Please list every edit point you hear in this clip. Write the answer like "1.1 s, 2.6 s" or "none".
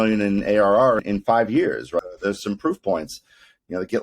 1.0 s, 2.0 s